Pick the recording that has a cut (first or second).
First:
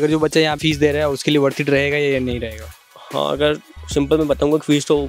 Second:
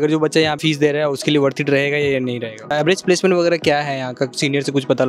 second